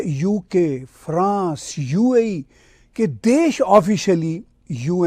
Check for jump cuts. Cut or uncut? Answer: uncut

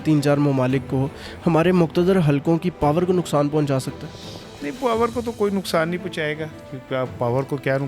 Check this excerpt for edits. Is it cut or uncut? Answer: uncut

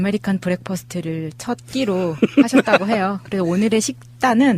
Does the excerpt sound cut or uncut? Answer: cut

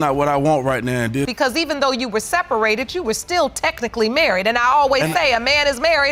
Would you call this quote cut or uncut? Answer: uncut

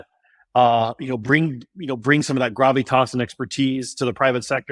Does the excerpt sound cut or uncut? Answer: uncut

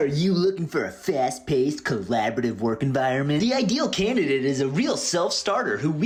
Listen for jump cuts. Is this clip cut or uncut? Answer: uncut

